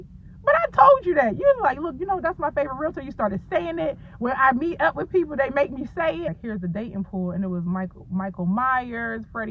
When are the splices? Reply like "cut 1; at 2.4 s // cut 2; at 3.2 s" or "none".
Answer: cut 1; at 6.3 s